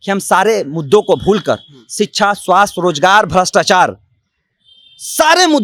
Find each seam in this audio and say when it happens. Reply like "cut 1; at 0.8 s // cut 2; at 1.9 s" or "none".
none